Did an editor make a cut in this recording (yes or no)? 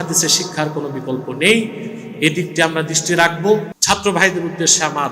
yes